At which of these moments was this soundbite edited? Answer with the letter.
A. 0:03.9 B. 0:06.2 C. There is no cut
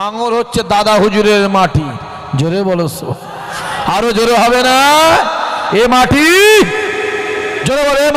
C